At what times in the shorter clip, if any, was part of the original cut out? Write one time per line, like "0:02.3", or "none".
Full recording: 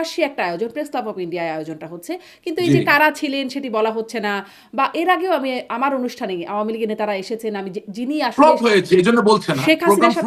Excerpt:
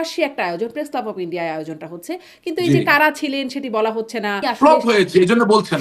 0:04.4